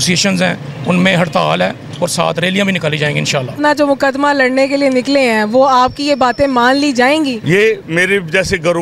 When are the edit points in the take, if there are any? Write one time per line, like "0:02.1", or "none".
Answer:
0:03.6
0:07.4